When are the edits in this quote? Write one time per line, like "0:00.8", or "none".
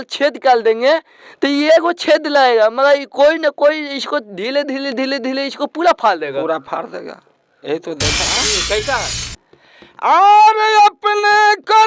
0:08.4

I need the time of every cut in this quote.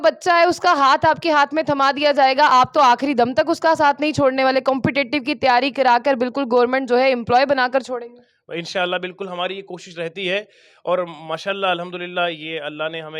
none

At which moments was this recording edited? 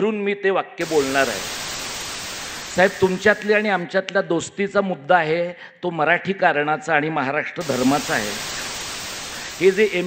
0:02.0
0:08.9

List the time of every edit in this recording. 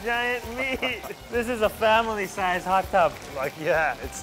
none

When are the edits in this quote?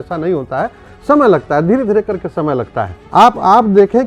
0:03.0

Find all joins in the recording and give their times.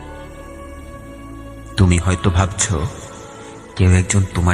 0:01.8

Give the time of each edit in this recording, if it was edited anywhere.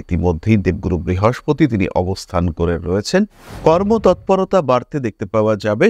0:03.5

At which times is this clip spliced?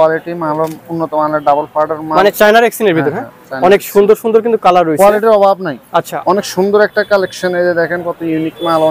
0:02.3
0:06.2

